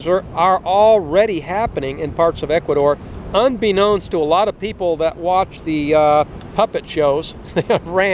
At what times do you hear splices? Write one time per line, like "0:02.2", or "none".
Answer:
0:03.1
0:06.4